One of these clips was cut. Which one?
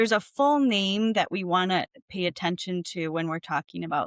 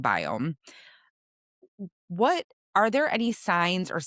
second; 1 cut; at 2.6 s

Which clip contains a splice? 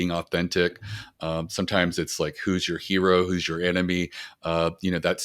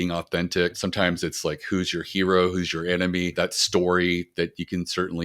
second; 2 cuts; at 0.8 s, 3.3 s

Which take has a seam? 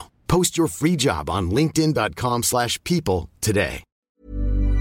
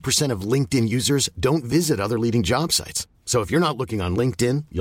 first; 1 cut; at 3.9 s

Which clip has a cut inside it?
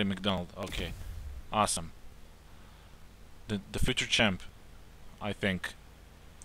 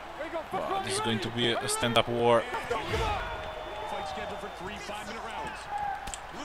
first; 1 cut; at 3.7 s

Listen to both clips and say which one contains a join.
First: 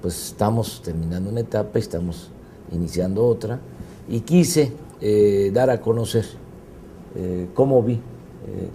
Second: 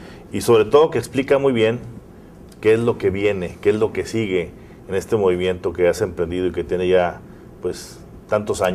first; 1 cut; at 5.1 s

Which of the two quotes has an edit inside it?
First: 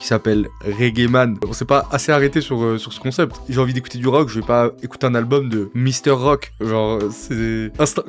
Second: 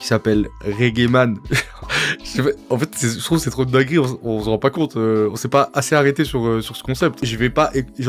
first; 3 cuts; at 1.5 s, 3.4 s, 5.7 s

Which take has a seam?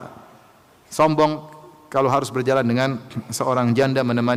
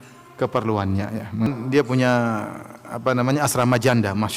second; 1 cut; at 1.5 s

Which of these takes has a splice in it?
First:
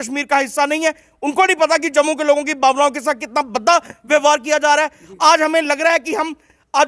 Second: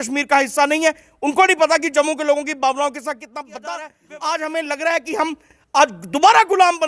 second; 1 cut; at 3.9 s

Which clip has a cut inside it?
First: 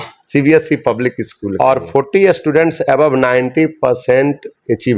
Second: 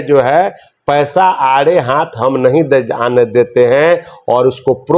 first; 1 cut; at 1.4 s

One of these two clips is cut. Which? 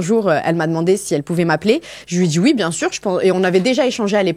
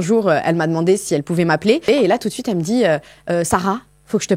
second; 1 cut; at 1.8 s

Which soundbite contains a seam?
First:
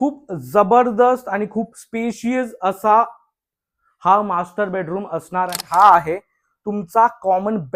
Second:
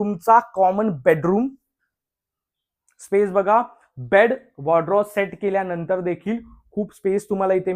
first; 1 cut; at 5.6 s

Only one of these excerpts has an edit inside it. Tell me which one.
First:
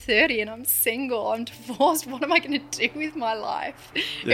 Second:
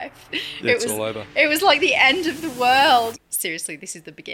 second; 1 cut; at 3.1 s

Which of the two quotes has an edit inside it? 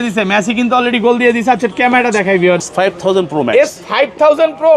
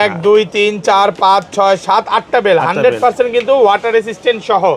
first; 1 cut; at 2.6 s

